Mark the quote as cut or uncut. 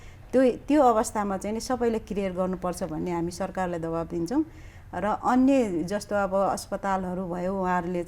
uncut